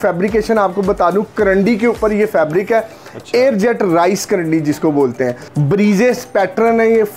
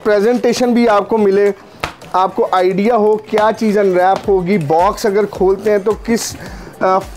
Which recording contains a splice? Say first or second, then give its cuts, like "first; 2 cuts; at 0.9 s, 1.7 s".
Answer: first; 1 cut; at 5.5 s